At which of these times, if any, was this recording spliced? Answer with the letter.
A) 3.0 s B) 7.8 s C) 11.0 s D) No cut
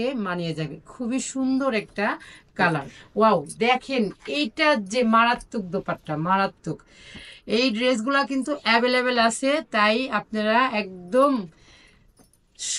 A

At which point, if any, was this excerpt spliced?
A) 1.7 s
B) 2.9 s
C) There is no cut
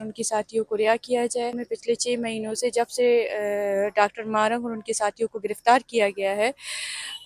A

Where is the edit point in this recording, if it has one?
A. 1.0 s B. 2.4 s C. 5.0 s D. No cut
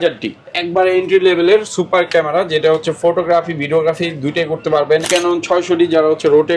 C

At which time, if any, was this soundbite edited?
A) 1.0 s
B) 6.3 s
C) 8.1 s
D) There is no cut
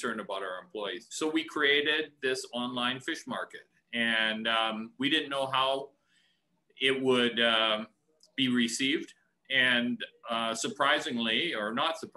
A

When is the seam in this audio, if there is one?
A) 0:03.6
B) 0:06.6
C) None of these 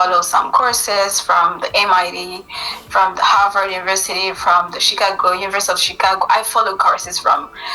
C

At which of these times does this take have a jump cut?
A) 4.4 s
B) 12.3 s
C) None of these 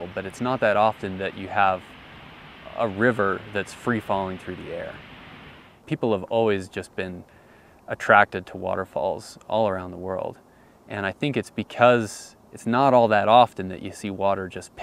C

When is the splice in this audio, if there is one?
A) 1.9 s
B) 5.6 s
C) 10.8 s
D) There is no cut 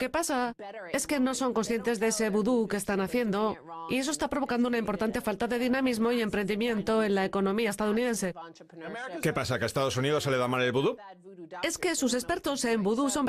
C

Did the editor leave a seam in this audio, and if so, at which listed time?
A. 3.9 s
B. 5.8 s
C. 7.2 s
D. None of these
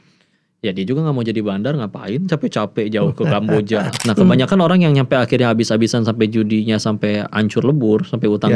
A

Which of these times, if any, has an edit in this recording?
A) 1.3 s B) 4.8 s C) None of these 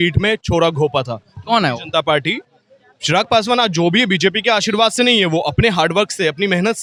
C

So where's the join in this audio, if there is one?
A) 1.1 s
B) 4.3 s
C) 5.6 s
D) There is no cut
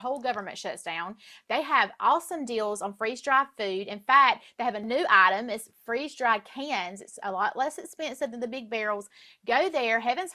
D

